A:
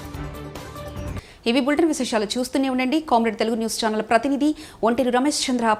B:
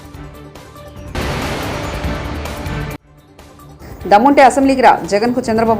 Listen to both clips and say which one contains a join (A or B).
B